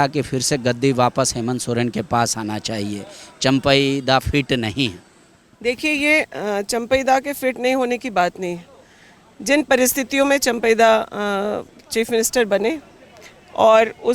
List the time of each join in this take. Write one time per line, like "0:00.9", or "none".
none

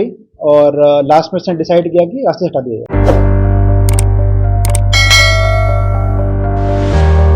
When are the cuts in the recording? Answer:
none

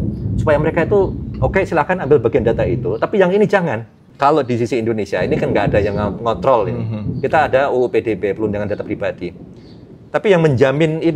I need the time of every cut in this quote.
0:04.0

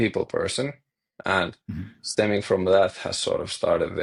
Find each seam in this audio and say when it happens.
none

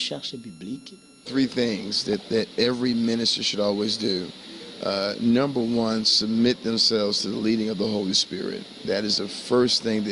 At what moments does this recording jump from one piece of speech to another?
0:01.3

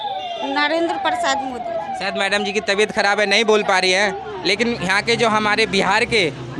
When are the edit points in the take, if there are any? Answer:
none

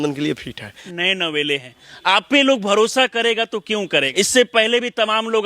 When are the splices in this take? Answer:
0:00.9
0:04.1

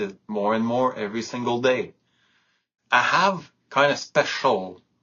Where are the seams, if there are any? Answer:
0:02.7

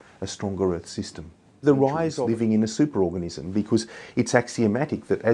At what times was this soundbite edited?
0:02.1

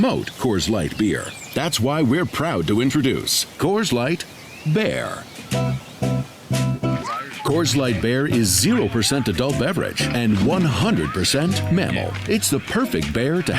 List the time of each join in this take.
0:05.4
0:07.9

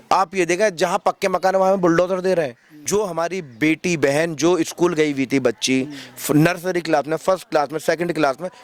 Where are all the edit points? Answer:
0:02.7

